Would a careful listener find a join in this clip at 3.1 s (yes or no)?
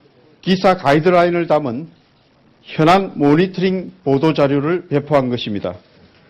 yes